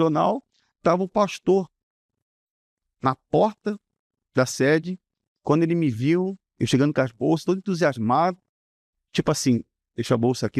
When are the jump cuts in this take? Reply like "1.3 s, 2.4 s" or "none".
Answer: none

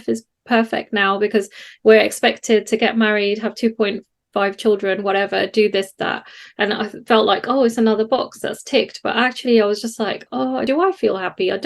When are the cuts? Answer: 10.6 s

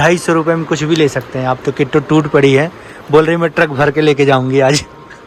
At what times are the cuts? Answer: none

